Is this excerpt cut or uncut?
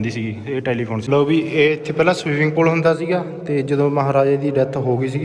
cut